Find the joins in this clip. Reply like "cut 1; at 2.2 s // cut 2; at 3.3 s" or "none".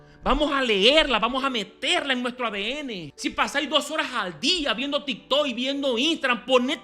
cut 1; at 3.1 s